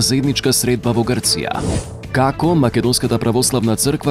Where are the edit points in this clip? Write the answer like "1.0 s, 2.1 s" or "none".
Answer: 2.1 s